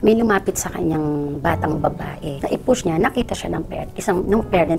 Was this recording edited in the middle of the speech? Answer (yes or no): yes